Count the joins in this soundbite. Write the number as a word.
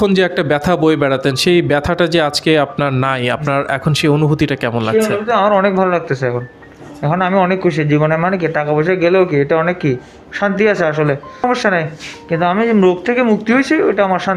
one